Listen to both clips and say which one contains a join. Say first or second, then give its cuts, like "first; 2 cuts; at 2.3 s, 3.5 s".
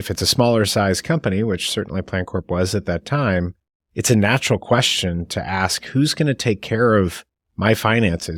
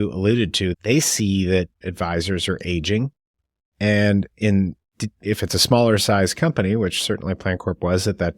second; 2 cuts; at 0.7 s, 1.8 s